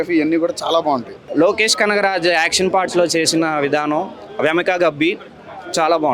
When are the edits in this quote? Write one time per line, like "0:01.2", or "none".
0:01.2